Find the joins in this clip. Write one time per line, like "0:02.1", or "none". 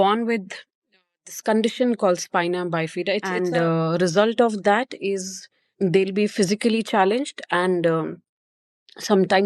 0:03.3